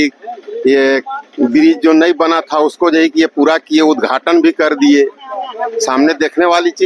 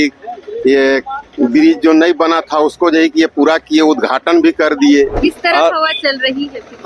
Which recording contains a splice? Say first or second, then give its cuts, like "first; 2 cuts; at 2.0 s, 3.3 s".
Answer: second; 1 cut; at 5.1 s